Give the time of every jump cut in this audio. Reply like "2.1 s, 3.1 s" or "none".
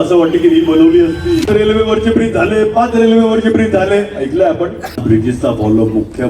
1.4 s, 4.9 s